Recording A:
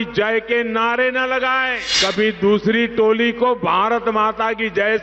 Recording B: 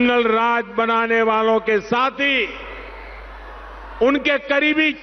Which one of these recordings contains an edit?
A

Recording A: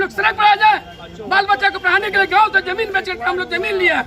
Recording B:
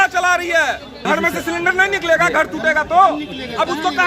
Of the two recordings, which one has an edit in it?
B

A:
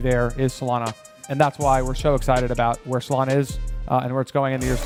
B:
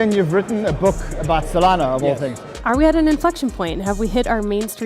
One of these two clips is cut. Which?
B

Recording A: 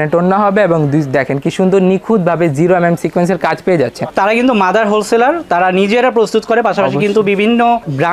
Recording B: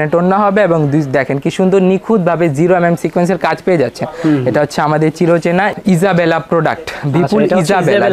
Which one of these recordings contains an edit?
A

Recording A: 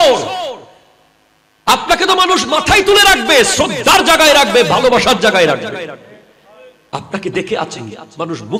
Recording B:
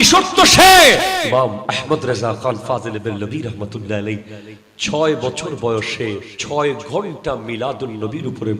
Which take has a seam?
B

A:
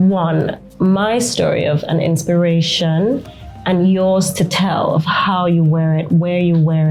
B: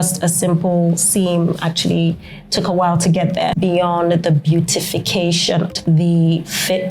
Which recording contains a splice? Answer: B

